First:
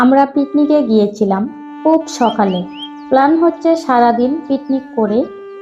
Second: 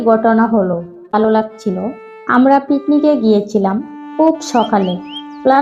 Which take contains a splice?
second; 1 cut; at 1.1 s

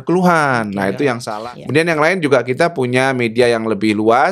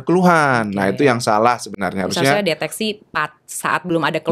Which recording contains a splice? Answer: first; 1 cut; at 1.3 s

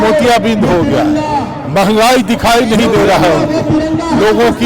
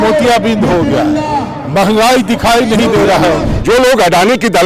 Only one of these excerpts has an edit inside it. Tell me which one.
second; 1 cut; at 3.5 s

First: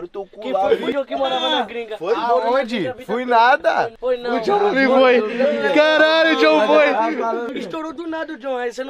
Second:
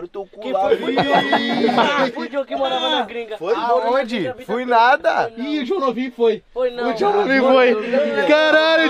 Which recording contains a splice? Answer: first; 3 cuts; at 0.9 s, 3.9 s, 7.5 s

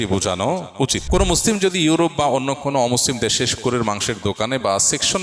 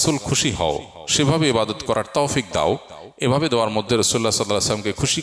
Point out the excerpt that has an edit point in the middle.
first; 1 cut; at 1.0 s

